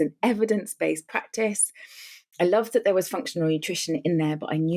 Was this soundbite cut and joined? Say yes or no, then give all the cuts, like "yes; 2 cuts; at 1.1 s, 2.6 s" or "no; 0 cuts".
no; 0 cuts